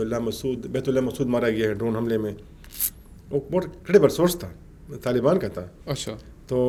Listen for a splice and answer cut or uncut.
uncut